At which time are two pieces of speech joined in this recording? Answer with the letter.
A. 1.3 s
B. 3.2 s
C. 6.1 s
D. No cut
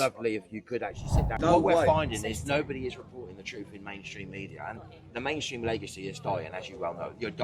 A